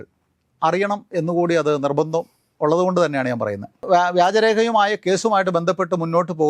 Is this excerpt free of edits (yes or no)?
yes